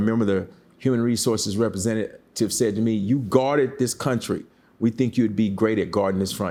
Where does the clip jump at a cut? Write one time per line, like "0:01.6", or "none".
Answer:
none